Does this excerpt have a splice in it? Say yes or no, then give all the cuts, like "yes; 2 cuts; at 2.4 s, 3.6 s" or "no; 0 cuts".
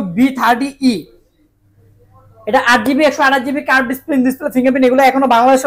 no; 0 cuts